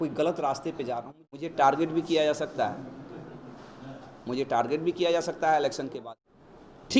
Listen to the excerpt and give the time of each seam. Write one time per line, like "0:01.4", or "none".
0:01.1
0:06.0